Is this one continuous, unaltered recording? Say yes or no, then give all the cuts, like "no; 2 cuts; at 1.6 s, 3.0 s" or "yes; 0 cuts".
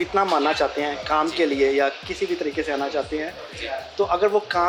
yes; 0 cuts